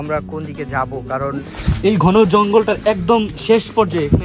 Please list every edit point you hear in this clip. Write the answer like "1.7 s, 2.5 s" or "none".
1.5 s